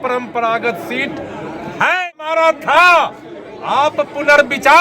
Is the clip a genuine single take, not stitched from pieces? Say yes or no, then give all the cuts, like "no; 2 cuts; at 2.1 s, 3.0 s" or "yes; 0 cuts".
no; 1 cut; at 2.0 s